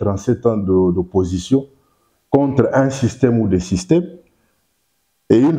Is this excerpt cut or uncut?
uncut